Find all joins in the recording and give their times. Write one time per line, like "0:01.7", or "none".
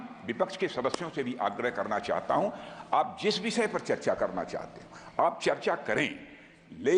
none